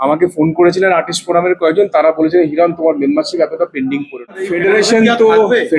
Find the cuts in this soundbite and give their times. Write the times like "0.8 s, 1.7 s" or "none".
4.5 s